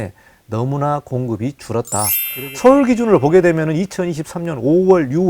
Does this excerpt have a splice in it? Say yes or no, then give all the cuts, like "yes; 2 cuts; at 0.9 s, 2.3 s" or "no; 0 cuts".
yes; 1 cut; at 2.2 s